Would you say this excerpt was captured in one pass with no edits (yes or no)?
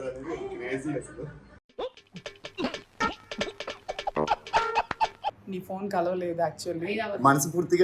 no